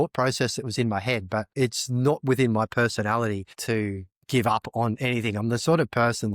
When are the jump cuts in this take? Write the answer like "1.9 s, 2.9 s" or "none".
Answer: 1.5 s, 3.5 s